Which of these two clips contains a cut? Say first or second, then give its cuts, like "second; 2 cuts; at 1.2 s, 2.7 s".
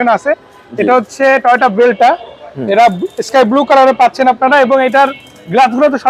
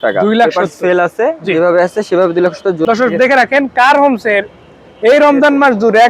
second; 1 cut; at 2.8 s